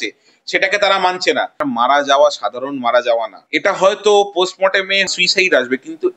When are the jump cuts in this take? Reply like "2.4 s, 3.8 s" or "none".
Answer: 1.6 s, 3.4 s, 5.1 s